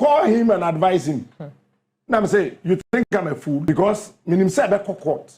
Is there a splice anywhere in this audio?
yes; 1 cut; at 3.6 s

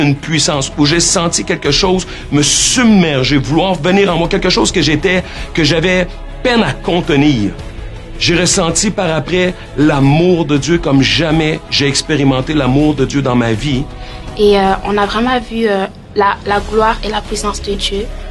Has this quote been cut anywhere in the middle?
no; 0 cuts

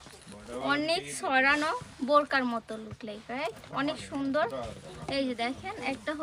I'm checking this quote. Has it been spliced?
yes; 1 cut; at 4.8 s

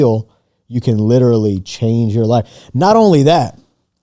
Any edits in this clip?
no; 0 cuts

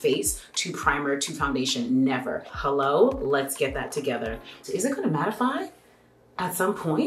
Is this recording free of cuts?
no; 2 cuts; at 2.5 s, 4.6 s

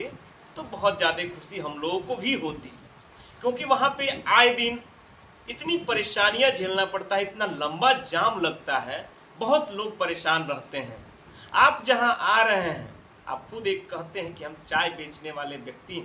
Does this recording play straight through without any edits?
yes; 0 cuts

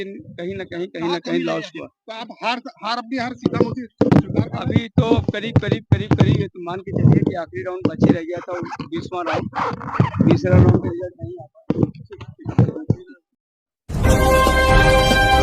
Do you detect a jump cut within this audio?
yes; 1 cut; at 13.5 s

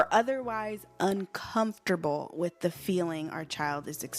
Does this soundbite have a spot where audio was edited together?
no; 0 cuts

